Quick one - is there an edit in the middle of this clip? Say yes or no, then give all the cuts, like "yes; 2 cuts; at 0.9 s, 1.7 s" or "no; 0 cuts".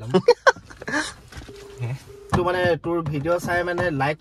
yes; 1 cut; at 2.3 s